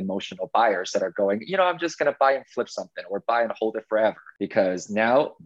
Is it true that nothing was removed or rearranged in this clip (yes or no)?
no